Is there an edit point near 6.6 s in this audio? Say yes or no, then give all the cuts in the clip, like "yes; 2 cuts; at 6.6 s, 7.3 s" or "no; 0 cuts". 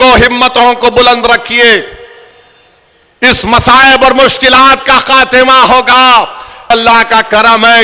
yes; 1 cut; at 6.6 s